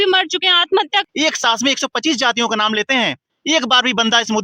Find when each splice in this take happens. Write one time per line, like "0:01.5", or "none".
0:01.0